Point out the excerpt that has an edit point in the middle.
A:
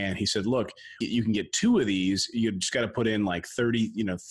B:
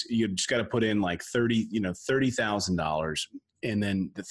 A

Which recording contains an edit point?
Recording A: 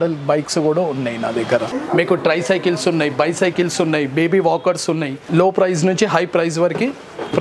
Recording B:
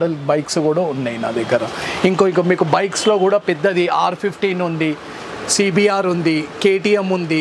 A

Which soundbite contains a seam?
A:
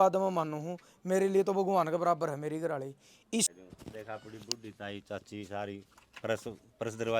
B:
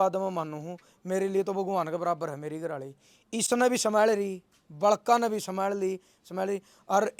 A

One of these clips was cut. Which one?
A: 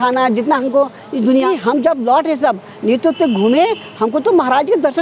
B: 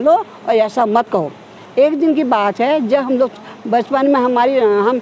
A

